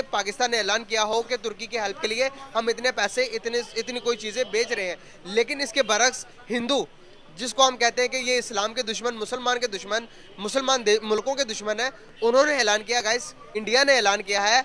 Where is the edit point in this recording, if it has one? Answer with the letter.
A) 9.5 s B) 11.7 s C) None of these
C